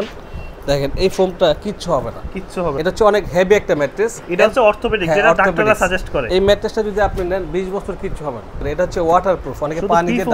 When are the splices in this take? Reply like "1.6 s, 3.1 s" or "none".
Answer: 2.8 s, 6.2 s, 8.7 s